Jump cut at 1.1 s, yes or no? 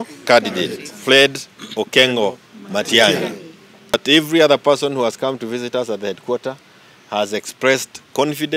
no